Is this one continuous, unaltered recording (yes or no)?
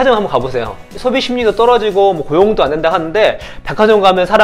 no